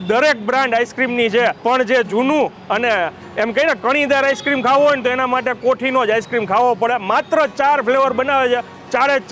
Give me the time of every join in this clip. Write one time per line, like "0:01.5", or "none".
0:01.6